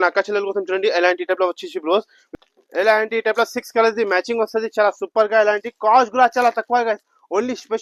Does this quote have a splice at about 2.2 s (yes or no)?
yes